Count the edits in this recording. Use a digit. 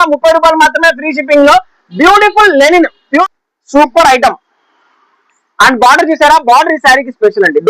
1